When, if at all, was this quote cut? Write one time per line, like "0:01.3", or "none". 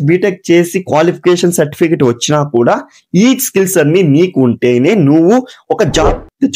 none